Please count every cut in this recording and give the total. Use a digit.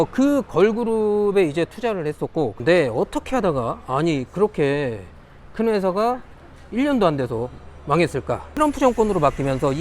2